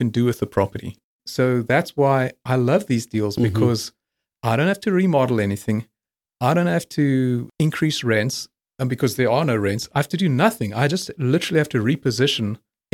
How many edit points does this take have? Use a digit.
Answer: 1